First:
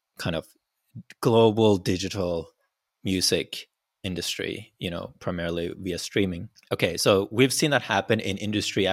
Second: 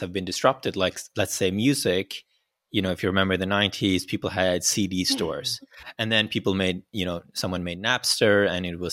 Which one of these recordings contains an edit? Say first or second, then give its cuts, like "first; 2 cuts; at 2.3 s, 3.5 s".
first; 1 cut; at 6.5 s